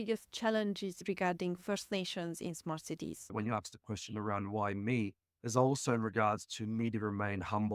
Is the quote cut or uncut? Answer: cut